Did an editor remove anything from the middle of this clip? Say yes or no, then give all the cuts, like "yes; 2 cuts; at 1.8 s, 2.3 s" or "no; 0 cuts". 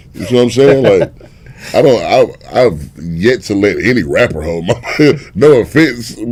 no; 0 cuts